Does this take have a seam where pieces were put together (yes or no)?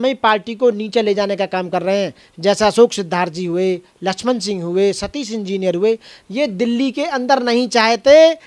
no